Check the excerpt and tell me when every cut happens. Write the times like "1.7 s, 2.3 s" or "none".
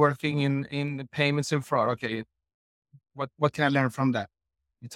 none